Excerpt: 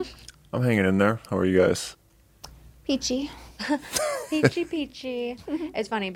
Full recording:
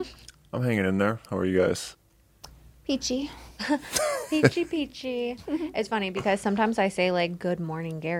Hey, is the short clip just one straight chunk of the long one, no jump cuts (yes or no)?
yes